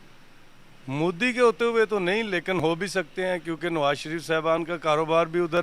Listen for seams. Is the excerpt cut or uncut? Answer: uncut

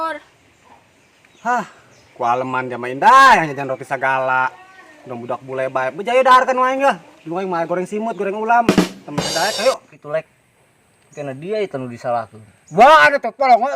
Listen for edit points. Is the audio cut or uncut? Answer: cut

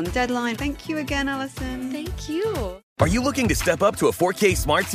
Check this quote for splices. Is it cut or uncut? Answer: cut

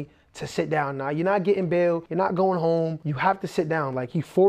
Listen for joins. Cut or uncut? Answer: cut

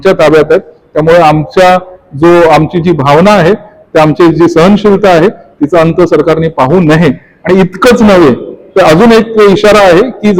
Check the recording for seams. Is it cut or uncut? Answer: uncut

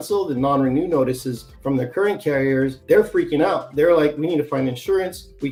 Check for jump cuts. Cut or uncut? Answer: uncut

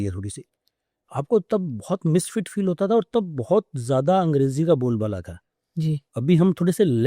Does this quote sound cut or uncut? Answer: uncut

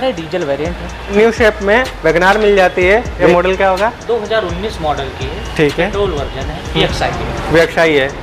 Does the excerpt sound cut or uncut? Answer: cut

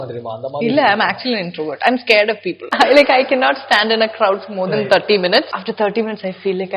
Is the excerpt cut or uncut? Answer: cut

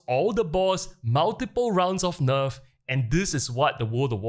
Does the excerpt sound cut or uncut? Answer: uncut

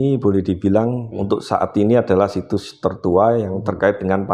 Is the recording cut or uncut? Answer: cut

